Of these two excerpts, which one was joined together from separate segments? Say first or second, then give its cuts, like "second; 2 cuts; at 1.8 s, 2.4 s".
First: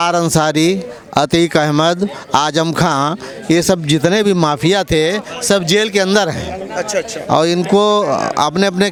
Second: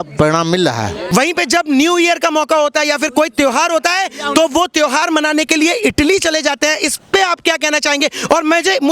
second; 1 cut; at 1.0 s